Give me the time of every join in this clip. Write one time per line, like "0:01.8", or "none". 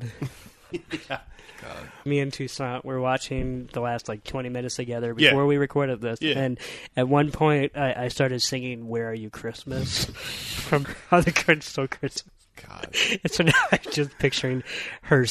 0:02.0